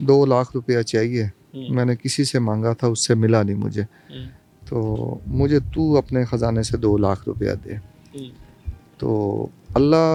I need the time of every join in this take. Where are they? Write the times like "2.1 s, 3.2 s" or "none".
none